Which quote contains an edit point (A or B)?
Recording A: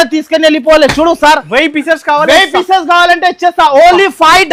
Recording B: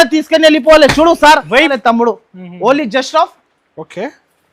B